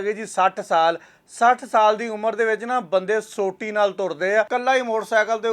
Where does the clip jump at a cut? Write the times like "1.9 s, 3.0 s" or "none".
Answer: 4.5 s